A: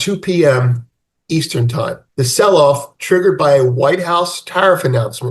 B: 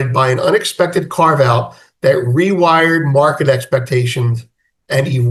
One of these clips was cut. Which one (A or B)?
A